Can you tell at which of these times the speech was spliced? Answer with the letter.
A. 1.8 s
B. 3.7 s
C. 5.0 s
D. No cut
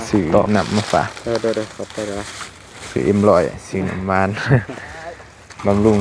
D